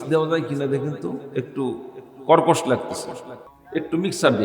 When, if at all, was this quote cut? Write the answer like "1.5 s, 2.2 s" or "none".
3.5 s